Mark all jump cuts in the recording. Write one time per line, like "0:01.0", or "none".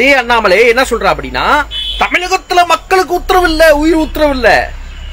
none